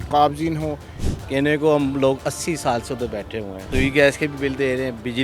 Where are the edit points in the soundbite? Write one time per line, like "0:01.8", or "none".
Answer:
0:00.9
0:03.6